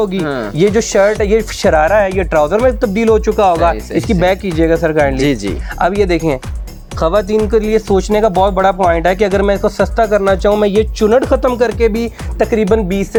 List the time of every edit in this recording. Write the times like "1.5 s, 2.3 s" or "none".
none